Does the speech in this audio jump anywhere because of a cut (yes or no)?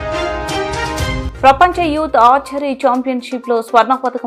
no